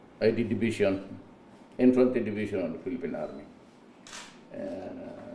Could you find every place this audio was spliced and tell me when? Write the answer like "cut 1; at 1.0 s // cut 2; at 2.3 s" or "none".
cut 1; at 4.3 s